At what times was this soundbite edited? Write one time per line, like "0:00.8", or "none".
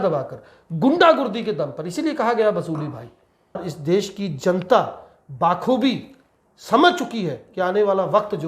0:03.7